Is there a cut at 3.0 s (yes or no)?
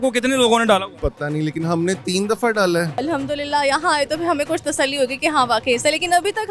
yes